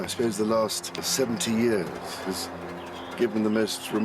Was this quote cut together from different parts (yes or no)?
yes